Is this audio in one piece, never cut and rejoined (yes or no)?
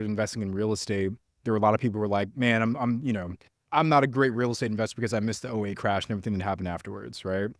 no